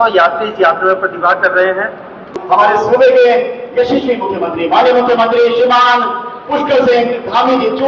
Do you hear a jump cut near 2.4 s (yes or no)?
yes